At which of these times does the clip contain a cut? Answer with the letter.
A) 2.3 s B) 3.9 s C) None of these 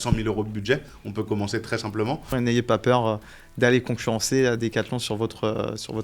A